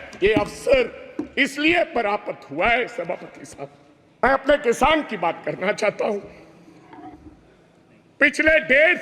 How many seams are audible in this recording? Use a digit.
1